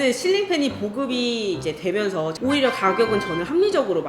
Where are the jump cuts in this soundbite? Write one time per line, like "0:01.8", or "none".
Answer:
0:02.3

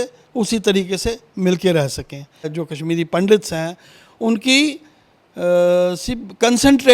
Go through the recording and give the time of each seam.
0:02.5

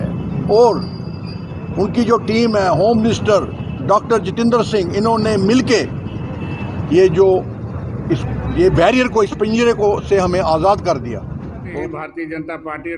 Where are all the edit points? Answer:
0:11.6

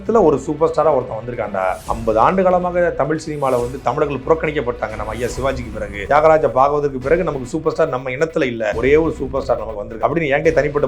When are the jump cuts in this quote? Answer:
0:01.9
0:06.0
0:08.8
0:09.9

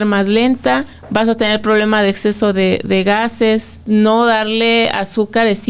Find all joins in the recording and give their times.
0:01.0
0:03.8

